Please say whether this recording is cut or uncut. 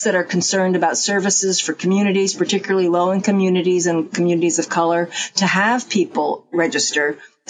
uncut